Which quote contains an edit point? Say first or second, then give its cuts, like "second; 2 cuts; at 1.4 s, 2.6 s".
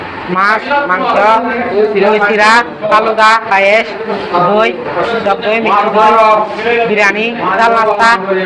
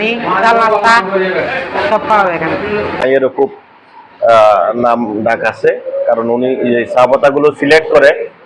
second; 1 cut; at 3.0 s